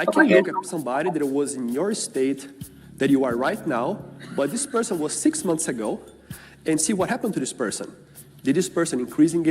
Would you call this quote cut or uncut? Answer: uncut